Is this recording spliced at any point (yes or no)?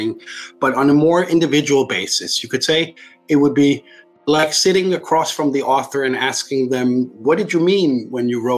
no